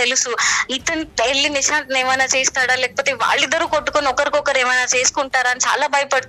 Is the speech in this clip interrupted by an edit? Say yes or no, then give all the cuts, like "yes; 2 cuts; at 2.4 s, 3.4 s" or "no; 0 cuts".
no; 0 cuts